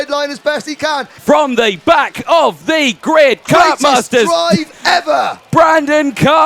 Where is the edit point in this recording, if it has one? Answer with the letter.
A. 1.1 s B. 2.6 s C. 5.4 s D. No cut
A